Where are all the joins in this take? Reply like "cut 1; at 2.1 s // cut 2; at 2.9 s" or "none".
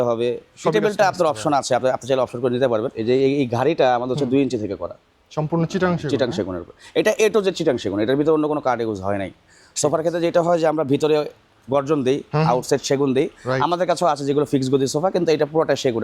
cut 1; at 2.9 s